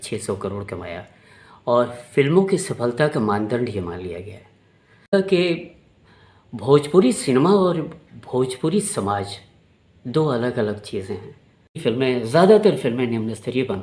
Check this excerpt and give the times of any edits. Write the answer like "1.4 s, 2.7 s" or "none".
5.1 s, 11.8 s